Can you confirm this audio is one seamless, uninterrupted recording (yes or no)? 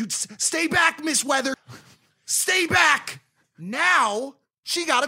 no